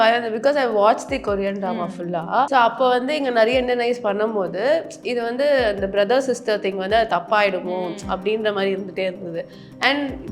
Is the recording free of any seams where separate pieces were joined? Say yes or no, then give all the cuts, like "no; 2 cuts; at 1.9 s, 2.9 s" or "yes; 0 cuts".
no; 1 cut; at 2.5 s